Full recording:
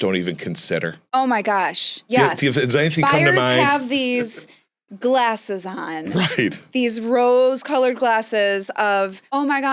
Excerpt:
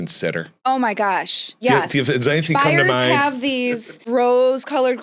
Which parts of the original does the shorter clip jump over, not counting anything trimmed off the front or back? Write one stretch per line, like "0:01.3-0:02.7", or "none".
0:04.5-0:07.0